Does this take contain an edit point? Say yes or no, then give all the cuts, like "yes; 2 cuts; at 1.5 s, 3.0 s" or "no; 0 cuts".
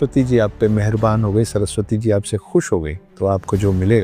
yes; 1 cut; at 3.0 s